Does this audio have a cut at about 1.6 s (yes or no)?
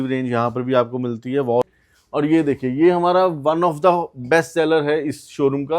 yes